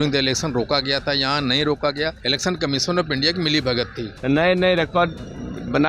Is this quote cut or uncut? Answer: cut